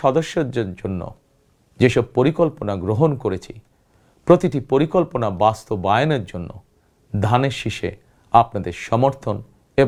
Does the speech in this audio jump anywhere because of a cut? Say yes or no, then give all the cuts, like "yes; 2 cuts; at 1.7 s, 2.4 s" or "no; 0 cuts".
no; 0 cuts